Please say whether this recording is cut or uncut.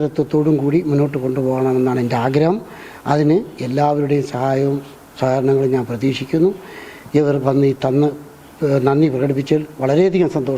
uncut